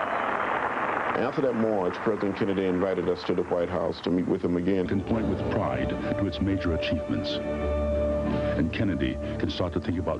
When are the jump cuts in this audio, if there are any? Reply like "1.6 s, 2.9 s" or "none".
none